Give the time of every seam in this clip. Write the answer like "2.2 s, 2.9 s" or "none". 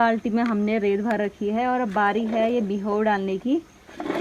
none